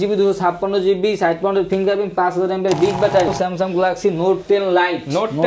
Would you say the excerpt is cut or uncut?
cut